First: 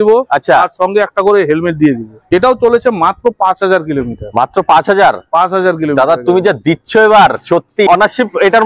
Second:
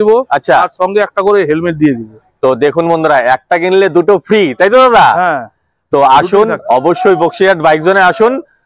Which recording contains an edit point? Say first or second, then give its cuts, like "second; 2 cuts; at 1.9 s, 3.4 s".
first; 2 cuts; at 2.1 s, 7.9 s